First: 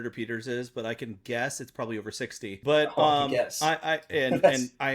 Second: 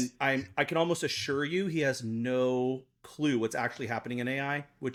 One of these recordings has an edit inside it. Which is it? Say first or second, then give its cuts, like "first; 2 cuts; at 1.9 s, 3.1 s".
first; 1 cut; at 2.6 s